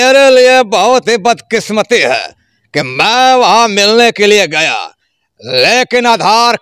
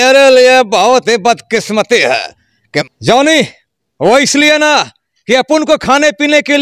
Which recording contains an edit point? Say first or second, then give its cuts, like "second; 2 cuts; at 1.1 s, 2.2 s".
second; 1 cut; at 2.9 s